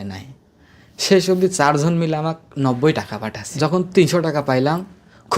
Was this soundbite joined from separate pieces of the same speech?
yes; 1 cut; at 3.5 s

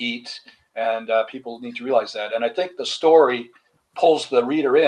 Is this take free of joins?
yes; 0 cuts

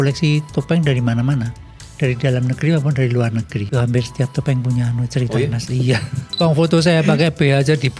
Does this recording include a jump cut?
yes; 2 cuts; at 3.7 s, 6.2 s

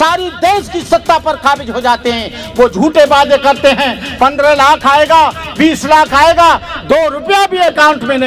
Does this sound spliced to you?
no; 0 cuts

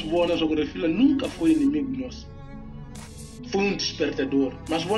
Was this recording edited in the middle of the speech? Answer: yes; 2 cuts; at 2.1 s, 3.5 s

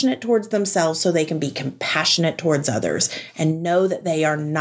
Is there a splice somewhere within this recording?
no; 0 cuts

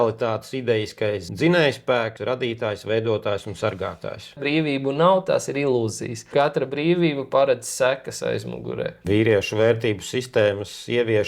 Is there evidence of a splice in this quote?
yes; 3 cuts; at 2.2 s, 4.4 s, 9.0 s

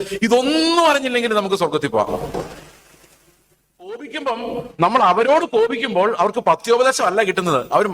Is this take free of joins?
no; 1 cut; at 4.0 s

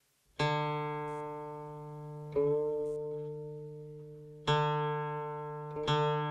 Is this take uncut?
yes; 0 cuts

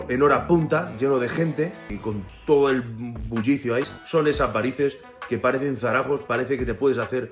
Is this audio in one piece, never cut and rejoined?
no; 2 cuts; at 1.9 s, 4.0 s

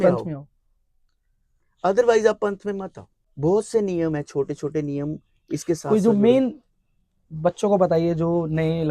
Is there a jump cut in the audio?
no; 0 cuts

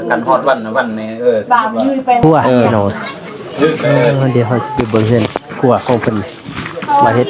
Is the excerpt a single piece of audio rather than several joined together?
no; 1 cut; at 4.1 s

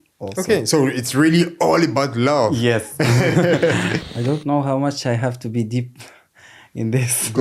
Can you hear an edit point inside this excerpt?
yes; 1 cut; at 4.0 s

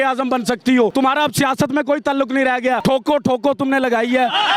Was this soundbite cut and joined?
yes; 2 cuts; at 0.9 s, 2.8 s

